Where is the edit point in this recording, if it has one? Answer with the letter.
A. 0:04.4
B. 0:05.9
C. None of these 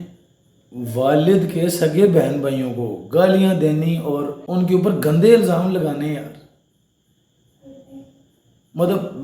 A